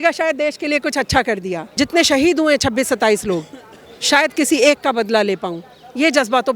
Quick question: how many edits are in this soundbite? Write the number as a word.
one